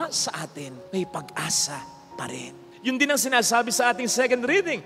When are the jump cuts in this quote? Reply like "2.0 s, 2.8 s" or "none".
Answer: none